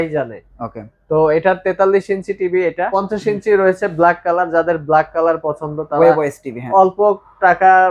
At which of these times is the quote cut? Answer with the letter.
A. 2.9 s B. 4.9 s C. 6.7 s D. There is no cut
A